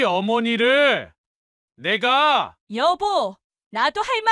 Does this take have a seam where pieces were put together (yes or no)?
no